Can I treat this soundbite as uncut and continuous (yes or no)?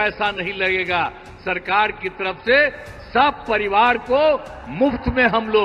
yes